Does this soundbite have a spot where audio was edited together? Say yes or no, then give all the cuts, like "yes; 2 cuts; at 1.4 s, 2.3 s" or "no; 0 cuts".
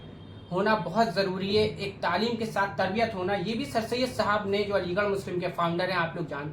no; 0 cuts